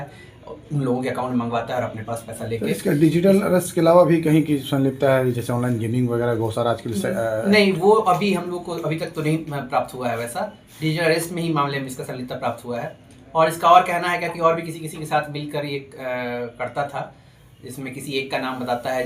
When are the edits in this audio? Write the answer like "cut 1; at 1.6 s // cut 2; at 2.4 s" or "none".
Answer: none

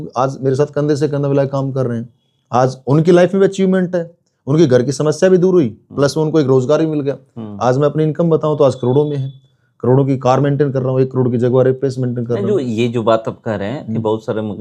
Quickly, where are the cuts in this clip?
none

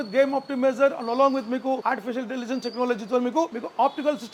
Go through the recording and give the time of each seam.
none

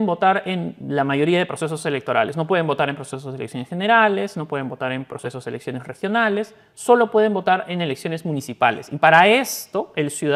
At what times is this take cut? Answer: none

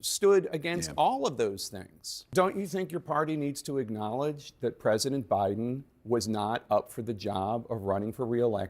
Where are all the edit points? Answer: cut 1; at 2.2 s

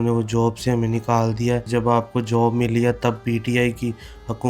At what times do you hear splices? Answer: cut 1; at 1.7 s

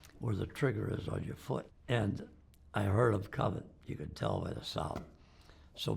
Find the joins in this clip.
cut 1; at 1.7 s

